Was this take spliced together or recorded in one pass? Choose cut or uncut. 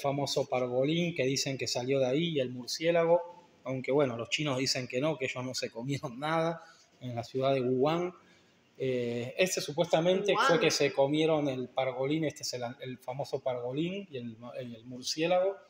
uncut